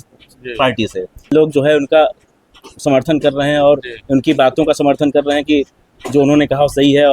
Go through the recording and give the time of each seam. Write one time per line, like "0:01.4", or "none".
0:01.3